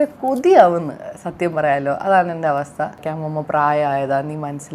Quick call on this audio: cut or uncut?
cut